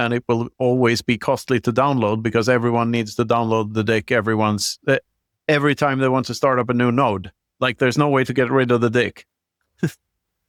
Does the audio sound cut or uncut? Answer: uncut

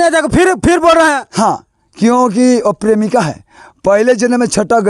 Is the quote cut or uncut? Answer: uncut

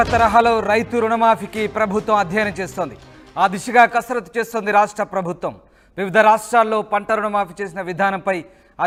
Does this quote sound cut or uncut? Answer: uncut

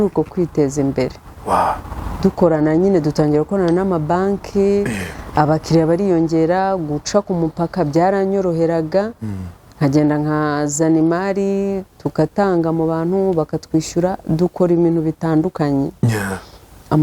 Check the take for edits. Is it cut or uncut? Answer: uncut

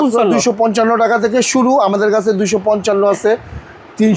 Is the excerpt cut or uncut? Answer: uncut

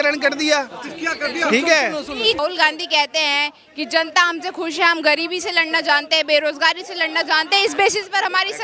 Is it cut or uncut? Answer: cut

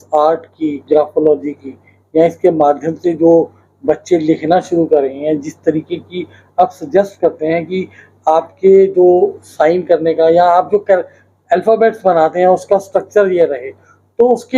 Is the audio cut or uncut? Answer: uncut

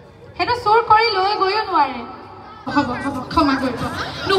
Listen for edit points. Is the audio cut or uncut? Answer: cut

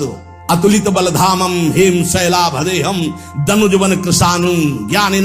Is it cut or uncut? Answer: uncut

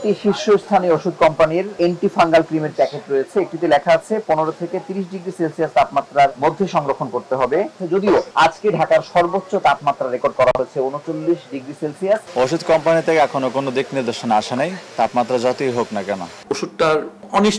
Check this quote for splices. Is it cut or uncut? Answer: cut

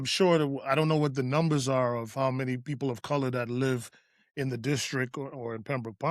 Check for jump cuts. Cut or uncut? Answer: uncut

